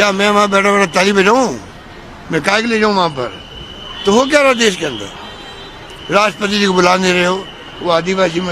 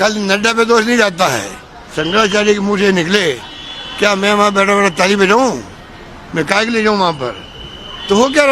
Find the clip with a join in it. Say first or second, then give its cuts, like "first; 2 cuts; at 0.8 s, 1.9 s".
second; 1 cut; at 1.8 s